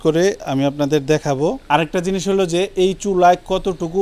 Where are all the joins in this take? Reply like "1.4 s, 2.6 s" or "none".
1.6 s